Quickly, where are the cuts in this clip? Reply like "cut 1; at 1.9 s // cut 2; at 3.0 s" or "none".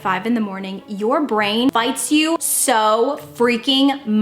cut 1; at 2.0 s